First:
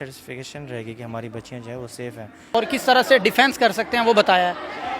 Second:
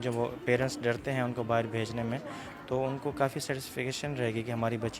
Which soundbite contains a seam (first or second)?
first